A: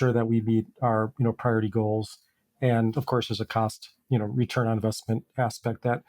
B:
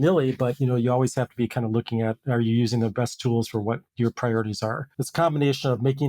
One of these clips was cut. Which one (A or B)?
B